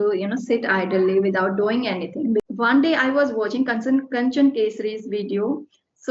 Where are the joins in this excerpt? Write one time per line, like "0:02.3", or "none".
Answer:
0:02.4